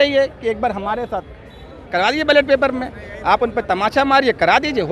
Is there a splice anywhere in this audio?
no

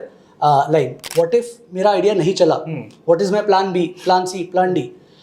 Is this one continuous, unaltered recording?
no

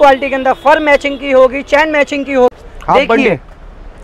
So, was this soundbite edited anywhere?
yes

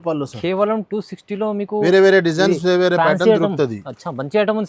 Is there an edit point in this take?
no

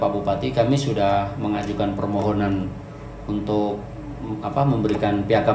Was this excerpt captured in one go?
yes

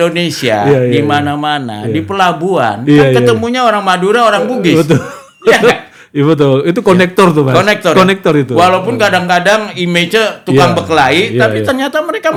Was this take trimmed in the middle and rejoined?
no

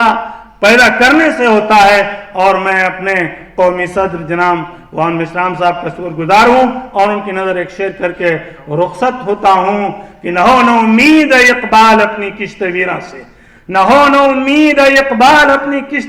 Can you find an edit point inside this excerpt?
no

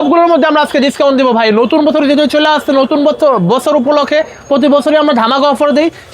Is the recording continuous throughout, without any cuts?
yes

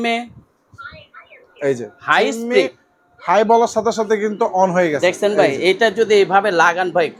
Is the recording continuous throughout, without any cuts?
yes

